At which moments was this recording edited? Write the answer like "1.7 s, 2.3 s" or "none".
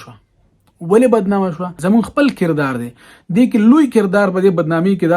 1.7 s